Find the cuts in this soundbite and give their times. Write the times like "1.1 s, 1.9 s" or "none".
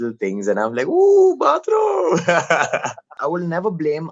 3.1 s